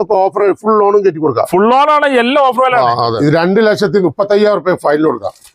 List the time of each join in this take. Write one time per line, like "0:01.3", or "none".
0:03.1